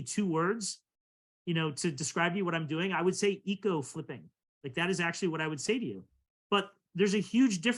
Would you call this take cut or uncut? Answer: uncut